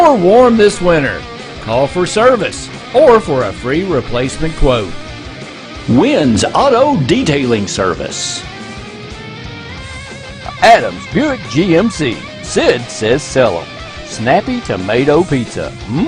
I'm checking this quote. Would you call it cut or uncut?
uncut